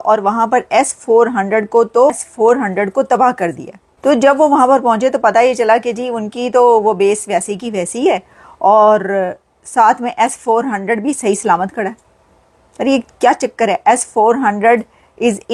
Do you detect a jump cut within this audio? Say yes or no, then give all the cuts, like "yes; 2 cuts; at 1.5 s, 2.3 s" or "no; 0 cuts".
yes; 1 cut; at 12.0 s